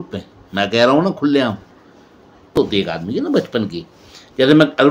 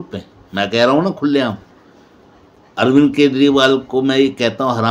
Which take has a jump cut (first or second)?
first